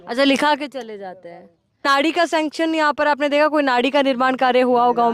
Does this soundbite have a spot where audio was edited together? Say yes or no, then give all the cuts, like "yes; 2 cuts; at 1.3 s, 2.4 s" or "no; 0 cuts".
yes; 1 cut; at 1.9 s